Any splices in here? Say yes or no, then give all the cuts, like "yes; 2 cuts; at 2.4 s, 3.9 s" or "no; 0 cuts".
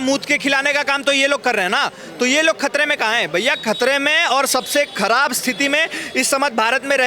no; 0 cuts